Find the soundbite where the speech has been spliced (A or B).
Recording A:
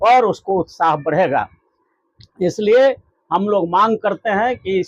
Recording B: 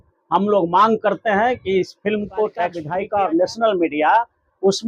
B